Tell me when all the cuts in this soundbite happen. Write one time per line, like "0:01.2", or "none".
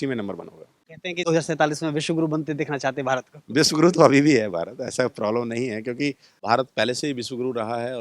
0:01.3
0:06.3

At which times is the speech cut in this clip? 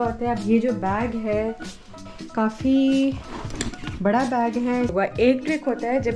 0:02.1
0:04.9

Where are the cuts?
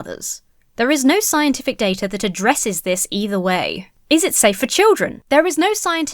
0:05.1

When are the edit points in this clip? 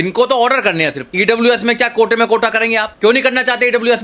0:01.0
0:02.9

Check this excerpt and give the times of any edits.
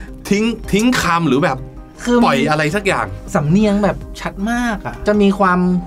0:04.9

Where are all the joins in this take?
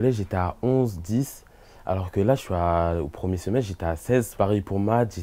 0:04.3

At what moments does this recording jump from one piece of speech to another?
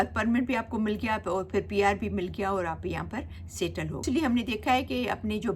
0:04.0

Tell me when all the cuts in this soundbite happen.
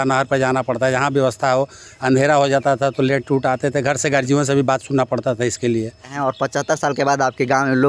0:06.1

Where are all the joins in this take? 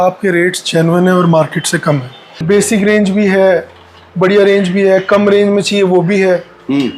0:02.4

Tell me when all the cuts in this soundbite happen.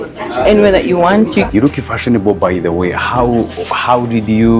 0:01.5

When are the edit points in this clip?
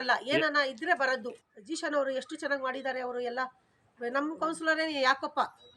0:01.4

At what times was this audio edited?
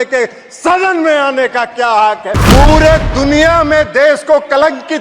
0:02.3

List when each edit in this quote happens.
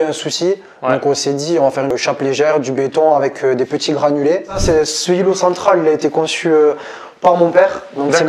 0:01.9
0:04.5

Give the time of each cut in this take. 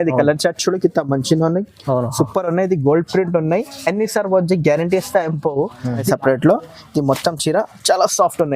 0:06.1

